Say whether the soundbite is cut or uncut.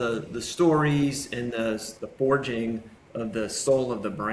uncut